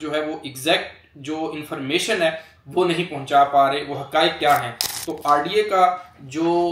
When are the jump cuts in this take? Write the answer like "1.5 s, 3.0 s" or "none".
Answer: none